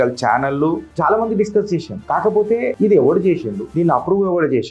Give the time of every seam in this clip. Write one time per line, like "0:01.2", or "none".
0:00.9
0:02.3
0:03.6